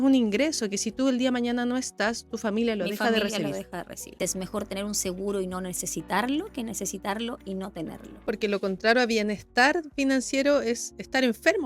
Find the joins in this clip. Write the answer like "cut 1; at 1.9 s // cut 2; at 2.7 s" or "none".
cut 1; at 4.2 s // cut 2; at 8.3 s